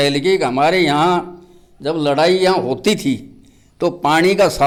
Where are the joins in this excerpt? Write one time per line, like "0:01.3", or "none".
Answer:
none

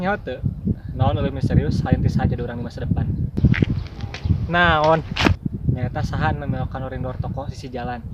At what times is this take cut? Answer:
0:03.3
0:05.4

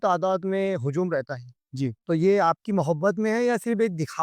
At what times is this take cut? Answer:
none

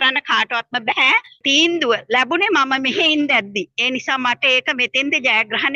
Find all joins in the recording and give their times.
0:01.4

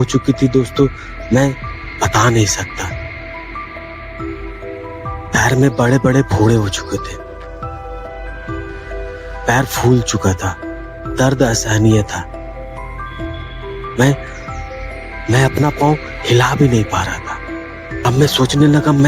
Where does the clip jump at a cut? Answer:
0:18.0

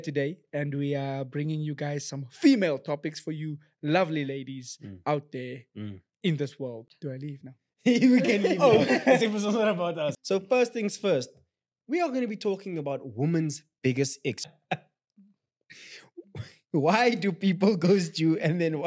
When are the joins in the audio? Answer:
0:06.8
0:10.2
0:14.4

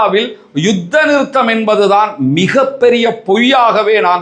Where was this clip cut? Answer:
none

